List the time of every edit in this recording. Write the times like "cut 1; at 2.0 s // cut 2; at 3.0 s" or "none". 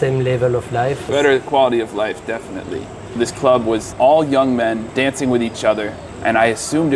cut 1; at 1.1 s // cut 2; at 3.2 s // cut 3; at 3.9 s // cut 4; at 4.9 s // cut 5; at 6.0 s

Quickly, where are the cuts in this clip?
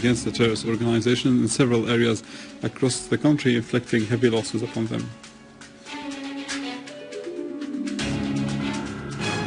cut 1; at 8.1 s

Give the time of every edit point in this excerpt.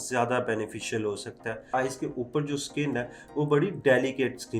cut 1; at 1.7 s

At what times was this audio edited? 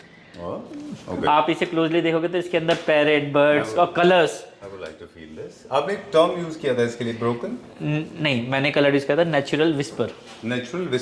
none

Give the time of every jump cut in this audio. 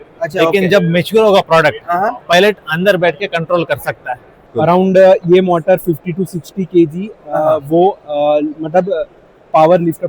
cut 1; at 4.5 s

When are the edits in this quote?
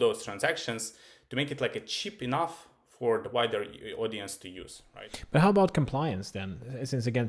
cut 1; at 4.8 s

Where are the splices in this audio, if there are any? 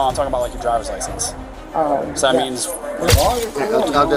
cut 1; at 3.1 s

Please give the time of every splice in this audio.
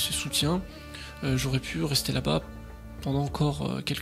none

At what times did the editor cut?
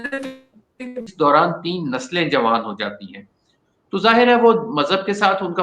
cut 1; at 1.1 s

